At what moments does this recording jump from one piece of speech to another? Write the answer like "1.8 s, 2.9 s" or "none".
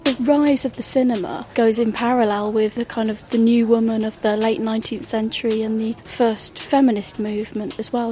2.7 s, 6.0 s